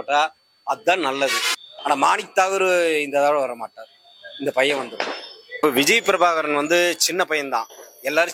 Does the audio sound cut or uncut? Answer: cut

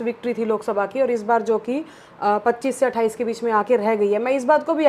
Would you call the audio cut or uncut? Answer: uncut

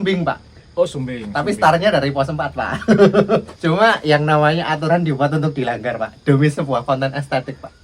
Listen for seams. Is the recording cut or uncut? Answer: cut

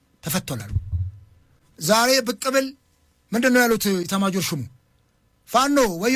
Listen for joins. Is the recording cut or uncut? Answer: uncut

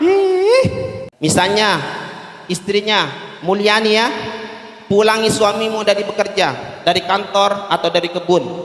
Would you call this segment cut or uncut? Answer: cut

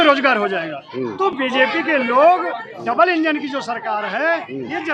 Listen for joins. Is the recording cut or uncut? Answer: uncut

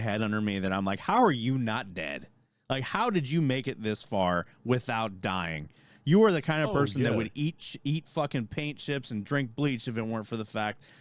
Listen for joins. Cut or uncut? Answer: uncut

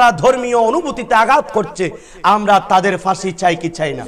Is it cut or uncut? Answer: uncut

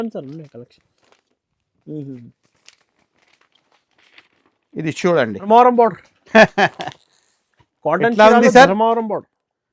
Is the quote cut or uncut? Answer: cut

